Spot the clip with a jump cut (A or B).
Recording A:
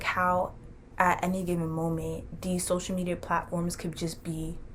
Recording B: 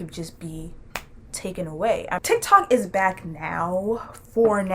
B